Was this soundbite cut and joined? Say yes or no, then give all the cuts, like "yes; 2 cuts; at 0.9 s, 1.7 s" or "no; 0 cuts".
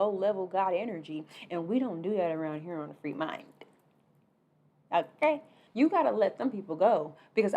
yes; 1 cut; at 5.6 s